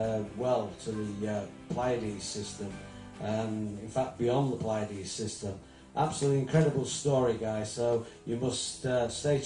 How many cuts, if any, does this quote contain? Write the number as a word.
zero